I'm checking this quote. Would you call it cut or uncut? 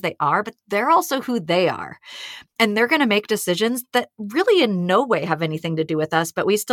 uncut